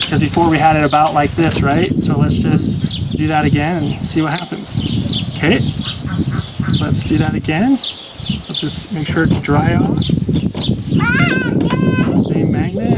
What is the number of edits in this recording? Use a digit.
0